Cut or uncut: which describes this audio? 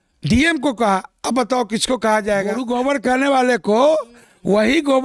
cut